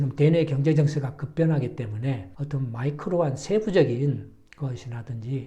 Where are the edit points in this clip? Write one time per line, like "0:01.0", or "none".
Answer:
none